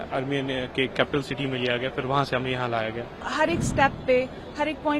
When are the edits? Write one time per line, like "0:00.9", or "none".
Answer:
0:03.2